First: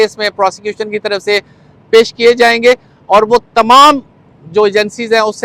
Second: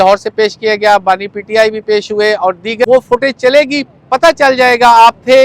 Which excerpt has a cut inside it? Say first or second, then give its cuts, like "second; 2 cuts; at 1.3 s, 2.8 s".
second; 1 cut; at 2.9 s